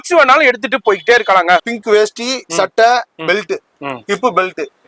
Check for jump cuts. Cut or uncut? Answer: cut